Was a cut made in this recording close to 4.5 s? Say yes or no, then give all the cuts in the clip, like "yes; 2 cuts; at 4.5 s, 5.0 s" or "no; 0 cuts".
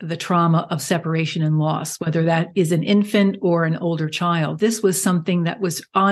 yes; 1 cut; at 4.5 s